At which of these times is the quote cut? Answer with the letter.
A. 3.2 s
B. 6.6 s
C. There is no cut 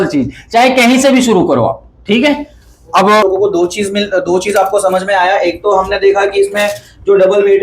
A